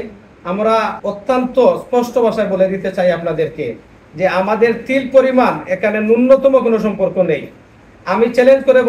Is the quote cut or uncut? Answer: cut